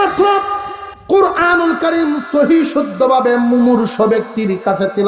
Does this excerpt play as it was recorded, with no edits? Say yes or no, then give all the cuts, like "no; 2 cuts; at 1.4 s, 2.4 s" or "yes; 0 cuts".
yes; 0 cuts